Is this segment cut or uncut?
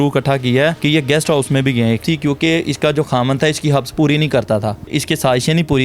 cut